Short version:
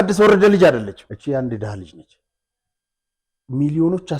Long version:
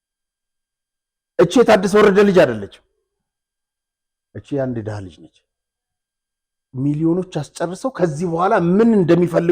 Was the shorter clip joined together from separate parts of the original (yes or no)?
yes